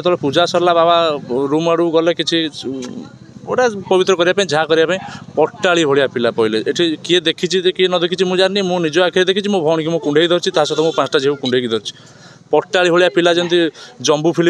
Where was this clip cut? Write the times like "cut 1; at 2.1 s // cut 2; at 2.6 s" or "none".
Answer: none